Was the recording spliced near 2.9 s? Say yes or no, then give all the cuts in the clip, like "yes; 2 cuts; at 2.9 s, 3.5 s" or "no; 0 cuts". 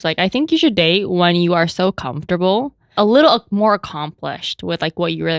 yes; 1 cut; at 2.9 s